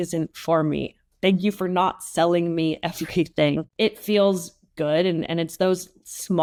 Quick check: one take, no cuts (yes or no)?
yes